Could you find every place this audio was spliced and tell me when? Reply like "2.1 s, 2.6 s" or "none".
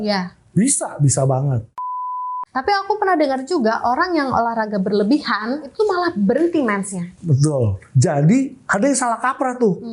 2.2 s, 5.6 s, 7.8 s, 8.6 s